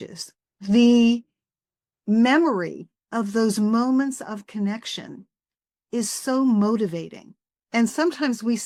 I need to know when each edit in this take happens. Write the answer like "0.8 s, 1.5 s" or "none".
none